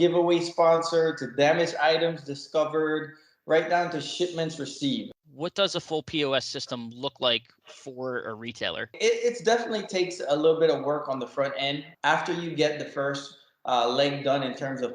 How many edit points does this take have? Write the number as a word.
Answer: three